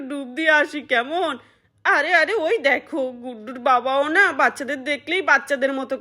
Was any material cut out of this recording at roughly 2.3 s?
no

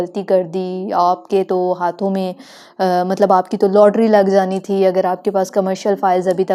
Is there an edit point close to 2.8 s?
no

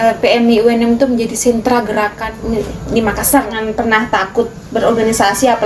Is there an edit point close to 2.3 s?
yes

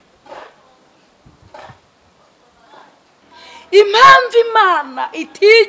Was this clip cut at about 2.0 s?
no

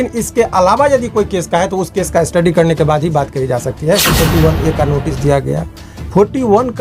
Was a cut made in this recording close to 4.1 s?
yes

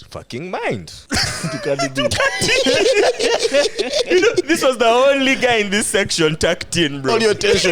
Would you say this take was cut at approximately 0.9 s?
yes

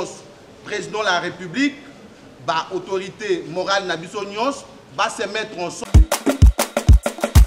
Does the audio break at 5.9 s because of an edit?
yes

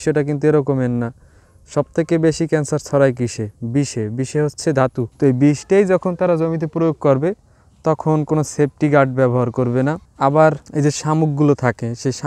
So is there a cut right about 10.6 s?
yes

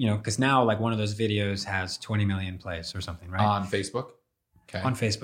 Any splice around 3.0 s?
no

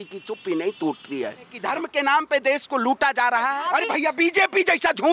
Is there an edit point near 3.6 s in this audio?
yes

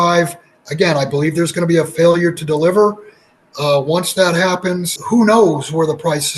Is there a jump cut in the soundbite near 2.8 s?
no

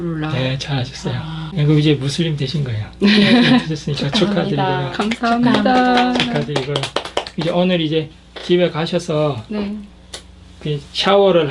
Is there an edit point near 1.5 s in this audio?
yes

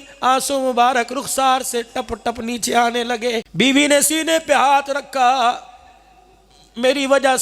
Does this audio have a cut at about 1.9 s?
no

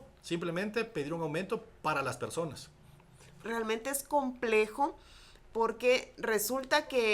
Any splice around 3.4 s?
yes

